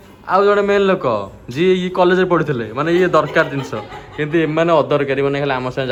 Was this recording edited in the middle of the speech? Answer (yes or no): no